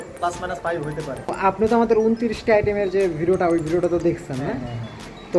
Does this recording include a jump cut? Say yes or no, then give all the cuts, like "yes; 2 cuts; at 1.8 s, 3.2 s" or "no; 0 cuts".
yes; 1 cut; at 1.3 s